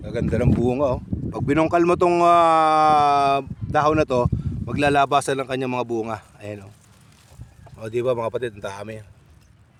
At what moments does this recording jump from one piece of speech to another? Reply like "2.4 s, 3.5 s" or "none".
none